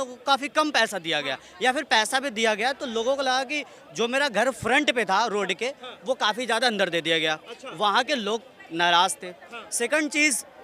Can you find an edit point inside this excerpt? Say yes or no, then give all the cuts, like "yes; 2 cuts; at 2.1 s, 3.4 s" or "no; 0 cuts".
no; 0 cuts